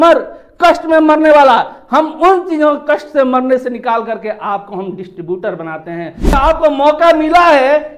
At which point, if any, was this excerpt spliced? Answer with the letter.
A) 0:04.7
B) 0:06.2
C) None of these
B